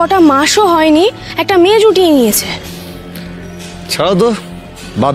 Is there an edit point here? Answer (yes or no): no